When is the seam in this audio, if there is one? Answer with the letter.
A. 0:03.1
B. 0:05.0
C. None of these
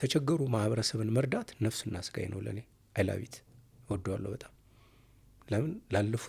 C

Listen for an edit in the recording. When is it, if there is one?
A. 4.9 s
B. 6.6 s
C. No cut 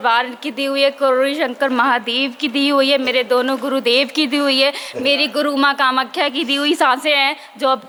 C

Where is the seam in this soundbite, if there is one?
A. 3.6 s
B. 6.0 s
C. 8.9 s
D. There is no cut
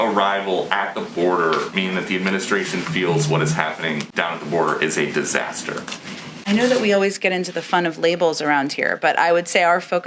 D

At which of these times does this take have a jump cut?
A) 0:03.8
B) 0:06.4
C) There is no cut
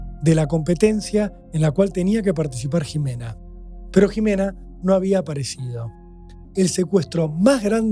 B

